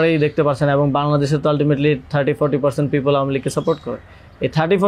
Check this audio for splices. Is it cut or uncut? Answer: uncut